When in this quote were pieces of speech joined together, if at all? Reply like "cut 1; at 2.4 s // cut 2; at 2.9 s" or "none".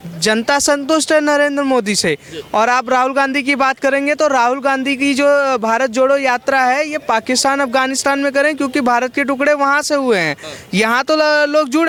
none